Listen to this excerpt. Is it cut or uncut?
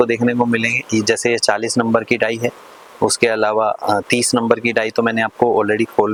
uncut